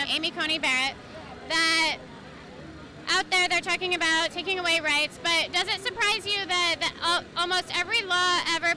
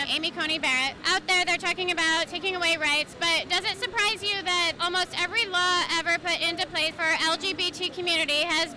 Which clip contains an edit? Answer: second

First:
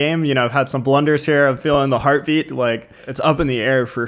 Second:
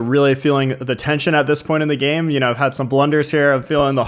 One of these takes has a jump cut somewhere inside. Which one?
first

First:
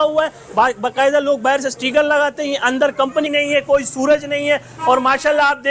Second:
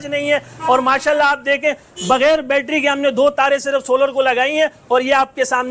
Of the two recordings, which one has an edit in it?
first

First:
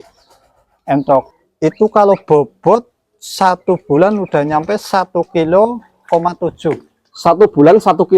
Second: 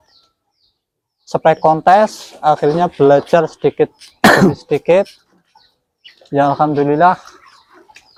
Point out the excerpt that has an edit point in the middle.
first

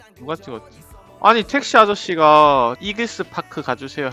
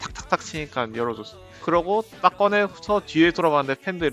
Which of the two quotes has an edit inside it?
first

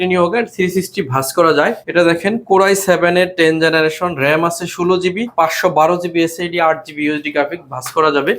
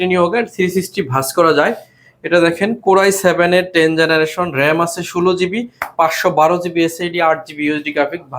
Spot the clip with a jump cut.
first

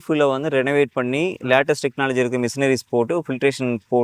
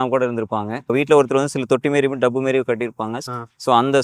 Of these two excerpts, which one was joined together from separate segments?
second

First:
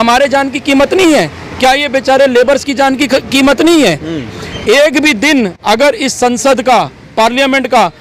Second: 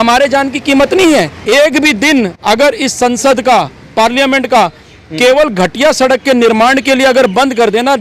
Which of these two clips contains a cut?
second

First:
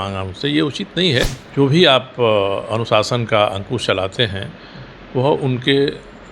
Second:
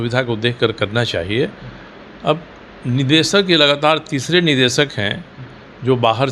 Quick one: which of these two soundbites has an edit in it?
first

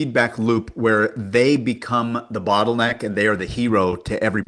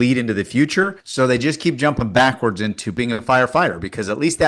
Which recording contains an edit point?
second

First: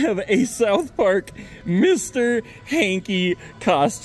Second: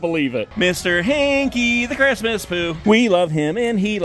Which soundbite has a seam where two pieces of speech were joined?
second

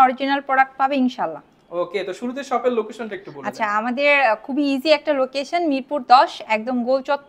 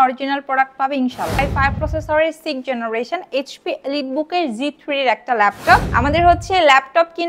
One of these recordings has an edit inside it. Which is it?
second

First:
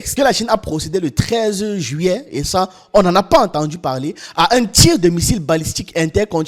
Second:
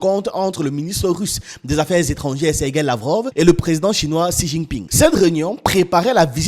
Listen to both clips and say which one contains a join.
second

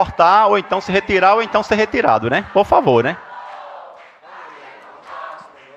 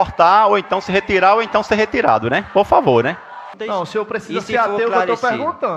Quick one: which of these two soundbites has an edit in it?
second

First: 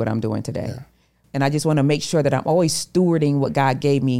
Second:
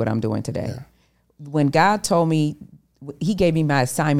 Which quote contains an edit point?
first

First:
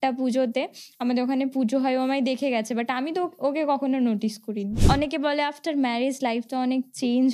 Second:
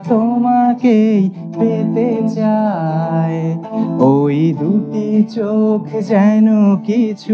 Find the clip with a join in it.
first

